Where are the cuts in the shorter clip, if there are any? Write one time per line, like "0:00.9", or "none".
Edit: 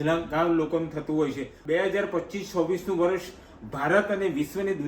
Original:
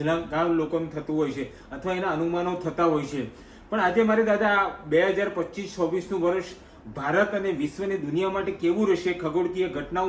0:01.6